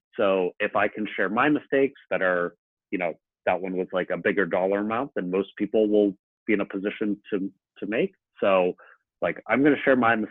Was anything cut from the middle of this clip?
no; 0 cuts

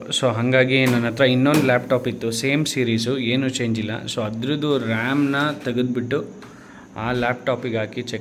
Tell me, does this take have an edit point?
no; 0 cuts

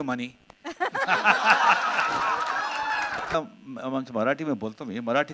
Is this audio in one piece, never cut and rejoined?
no; 1 cut; at 3.3 s

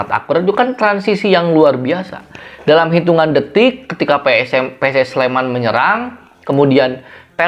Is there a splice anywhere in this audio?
no; 0 cuts

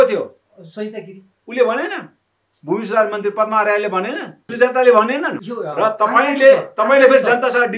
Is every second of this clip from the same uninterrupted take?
no; 2 cuts; at 4.4 s, 5.3 s

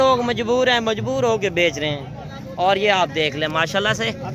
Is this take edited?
yes; 1 cut; at 2.3 s

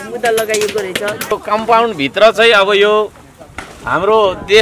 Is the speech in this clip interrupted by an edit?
yes; 1 cut; at 1.4 s

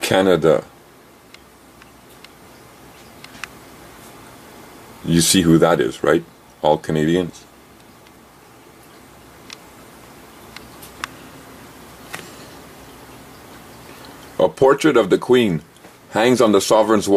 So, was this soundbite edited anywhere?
no; 0 cuts

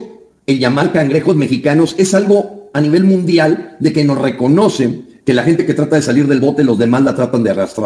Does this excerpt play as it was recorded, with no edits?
yes; 0 cuts

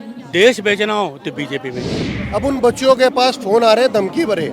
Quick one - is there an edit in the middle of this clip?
yes; 1 cut; at 2.1 s

